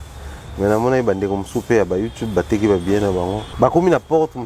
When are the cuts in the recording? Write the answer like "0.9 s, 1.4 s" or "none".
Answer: 3.4 s